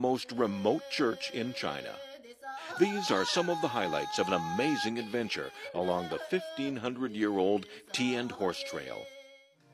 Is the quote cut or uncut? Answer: uncut